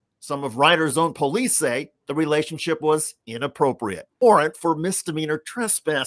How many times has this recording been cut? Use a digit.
1